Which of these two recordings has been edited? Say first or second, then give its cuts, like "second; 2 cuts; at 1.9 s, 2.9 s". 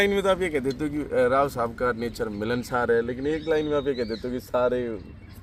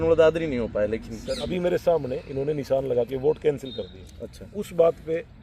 second; 1 cut; at 1.5 s